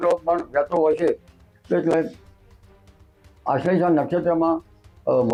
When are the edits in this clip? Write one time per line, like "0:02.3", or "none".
none

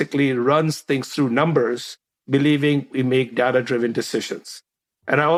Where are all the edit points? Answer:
none

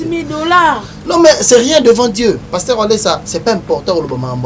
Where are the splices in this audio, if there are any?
0:02.4
0:03.2

